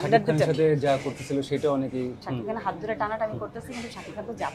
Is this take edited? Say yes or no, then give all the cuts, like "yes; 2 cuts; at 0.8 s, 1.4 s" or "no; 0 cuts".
yes; 1 cut; at 2.1 s